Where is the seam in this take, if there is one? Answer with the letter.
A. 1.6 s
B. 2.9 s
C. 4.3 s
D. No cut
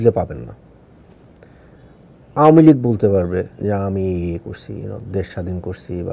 A